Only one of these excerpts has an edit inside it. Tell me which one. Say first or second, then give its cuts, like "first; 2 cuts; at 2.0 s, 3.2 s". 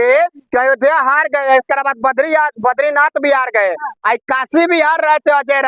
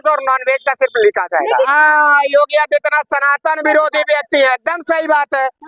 second; 1 cut; at 1.7 s